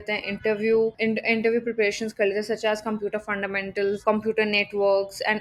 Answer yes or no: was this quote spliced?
yes